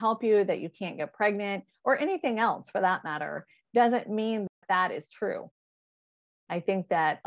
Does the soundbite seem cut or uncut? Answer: uncut